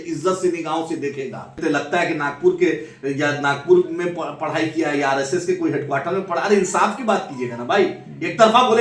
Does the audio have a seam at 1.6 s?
yes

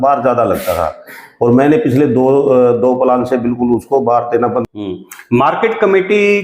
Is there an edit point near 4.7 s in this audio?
yes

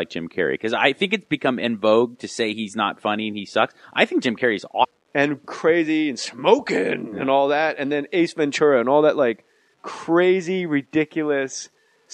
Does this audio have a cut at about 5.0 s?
no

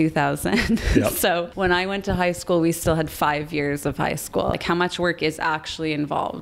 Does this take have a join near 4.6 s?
yes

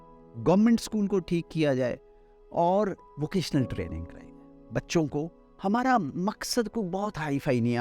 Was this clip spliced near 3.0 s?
yes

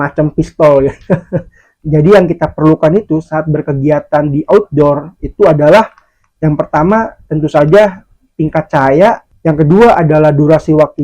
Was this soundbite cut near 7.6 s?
no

